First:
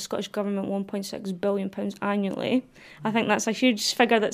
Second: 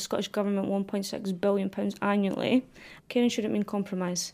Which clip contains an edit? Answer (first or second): second